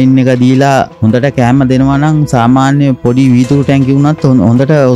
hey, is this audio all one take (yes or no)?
no